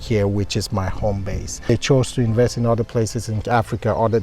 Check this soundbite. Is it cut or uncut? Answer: cut